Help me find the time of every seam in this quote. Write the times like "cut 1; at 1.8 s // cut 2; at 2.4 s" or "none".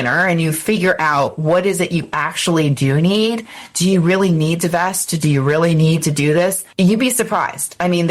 cut 1; at 6.6 s